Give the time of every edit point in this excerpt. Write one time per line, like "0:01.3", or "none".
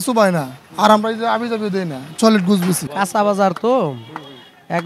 0:02.9